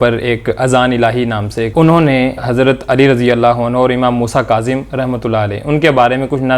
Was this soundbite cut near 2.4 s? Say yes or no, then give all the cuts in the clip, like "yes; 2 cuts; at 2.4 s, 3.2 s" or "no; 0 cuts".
yes; 2 cuts; at 1.7 s, 2.4 s